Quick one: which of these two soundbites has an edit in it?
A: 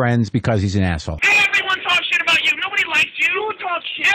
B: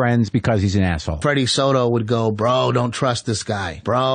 A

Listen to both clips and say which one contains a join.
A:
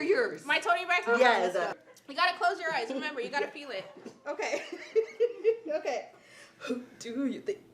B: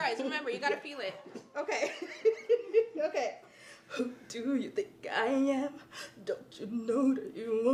A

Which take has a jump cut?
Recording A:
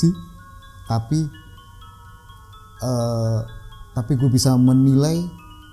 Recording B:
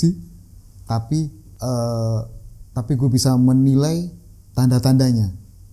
B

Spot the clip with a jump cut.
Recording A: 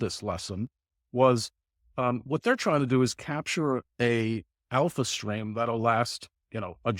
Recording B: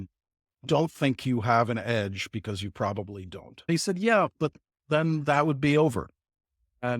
B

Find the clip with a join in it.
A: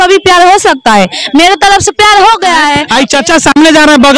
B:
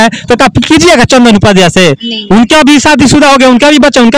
A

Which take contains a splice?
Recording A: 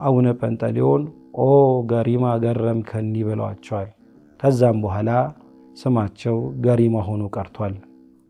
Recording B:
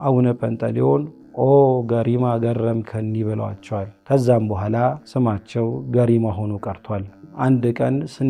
B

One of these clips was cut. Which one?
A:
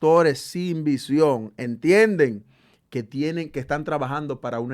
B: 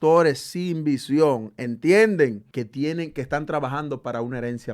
B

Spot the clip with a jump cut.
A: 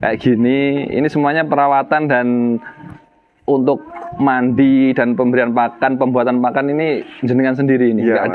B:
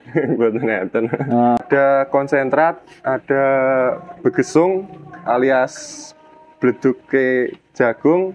B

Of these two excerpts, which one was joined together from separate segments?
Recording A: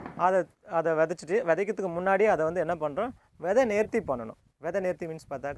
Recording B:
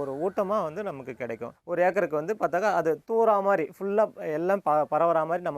B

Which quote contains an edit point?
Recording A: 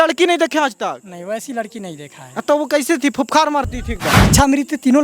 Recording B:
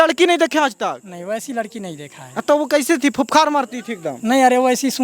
A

